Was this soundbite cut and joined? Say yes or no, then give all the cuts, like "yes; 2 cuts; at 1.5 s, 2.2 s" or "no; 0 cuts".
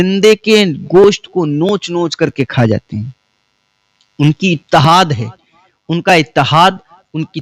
no; 0 cuts